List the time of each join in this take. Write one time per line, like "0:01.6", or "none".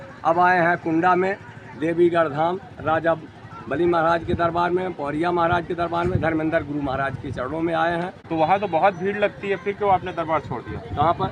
0:08.2